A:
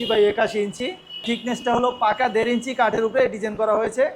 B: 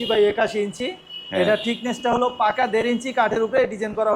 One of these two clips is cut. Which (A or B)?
A